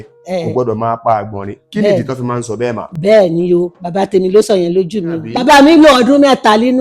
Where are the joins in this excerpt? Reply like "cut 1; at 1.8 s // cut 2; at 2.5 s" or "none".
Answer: cut 1; at 5.3 s